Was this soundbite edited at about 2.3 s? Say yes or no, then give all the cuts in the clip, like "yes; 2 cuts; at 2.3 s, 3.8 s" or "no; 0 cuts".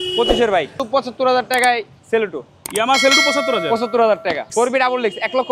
no; 2 cuts; at 0.8 s, 4.5 s